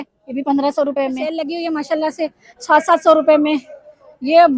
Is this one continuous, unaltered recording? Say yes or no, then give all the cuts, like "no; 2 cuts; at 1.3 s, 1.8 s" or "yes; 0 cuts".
no; 1 cut; at 1.3 s